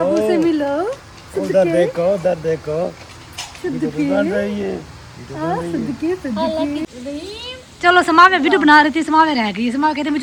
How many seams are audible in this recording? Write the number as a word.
zero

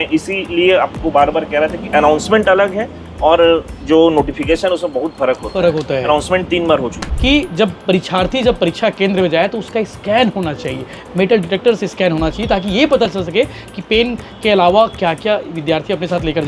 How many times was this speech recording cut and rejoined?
one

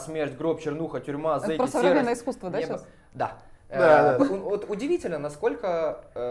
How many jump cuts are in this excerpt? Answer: zero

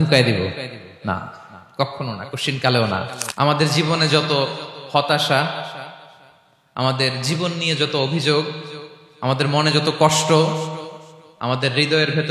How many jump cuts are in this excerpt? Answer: one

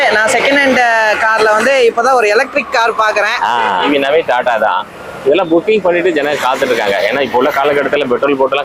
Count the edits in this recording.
one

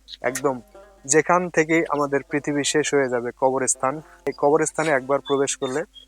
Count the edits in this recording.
one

